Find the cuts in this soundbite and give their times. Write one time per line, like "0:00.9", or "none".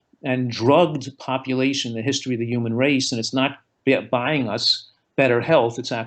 none